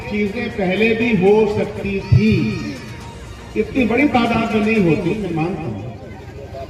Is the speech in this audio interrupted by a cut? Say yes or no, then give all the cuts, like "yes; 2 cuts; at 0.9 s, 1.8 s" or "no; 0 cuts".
no; 0 cuts